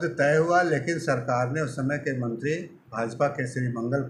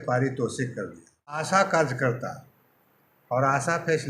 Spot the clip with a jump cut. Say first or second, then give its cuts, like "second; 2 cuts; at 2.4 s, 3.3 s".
second; 1 cut; at 1.4 s